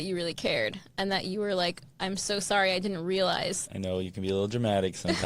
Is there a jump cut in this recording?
yes; 1 cut; at 3.6 s

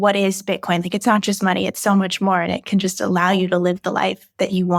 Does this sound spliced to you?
no; 0 cuts

